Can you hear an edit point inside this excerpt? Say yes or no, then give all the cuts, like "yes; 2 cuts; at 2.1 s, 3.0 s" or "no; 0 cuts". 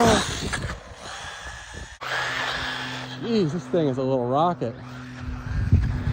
yes; 1 cut; at 2.0 s